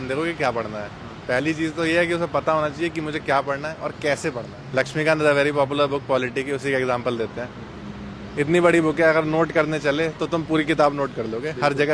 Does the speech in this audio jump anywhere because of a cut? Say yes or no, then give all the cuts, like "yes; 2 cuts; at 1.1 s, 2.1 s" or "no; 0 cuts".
yes; 1 cut; at 4.5 s